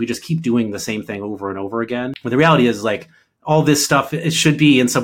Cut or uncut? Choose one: cut